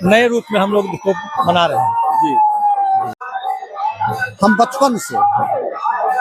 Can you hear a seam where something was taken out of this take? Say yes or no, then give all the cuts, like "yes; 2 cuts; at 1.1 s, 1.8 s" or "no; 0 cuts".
yes; 1 cut; at 3.2 s